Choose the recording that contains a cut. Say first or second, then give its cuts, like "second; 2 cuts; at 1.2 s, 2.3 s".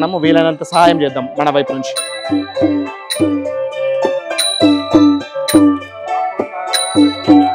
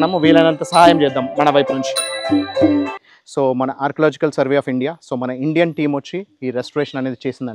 second; 1 cut; at 3.0 s